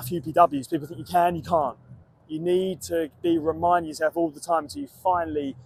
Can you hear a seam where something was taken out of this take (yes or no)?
no